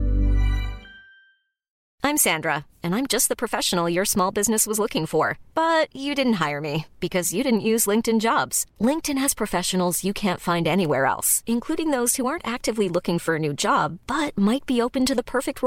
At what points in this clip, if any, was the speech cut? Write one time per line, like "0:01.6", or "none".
0:01.8